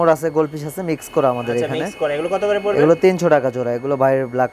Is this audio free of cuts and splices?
yes; 0 cuts

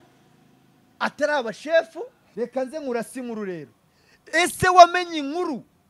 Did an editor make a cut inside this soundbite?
yes; 1 cut; at 2.2 s

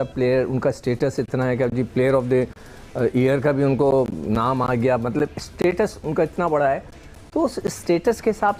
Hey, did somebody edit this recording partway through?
no; 0 cuts

